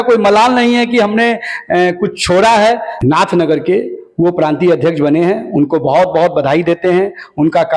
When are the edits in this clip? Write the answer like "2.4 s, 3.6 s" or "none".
3.0 s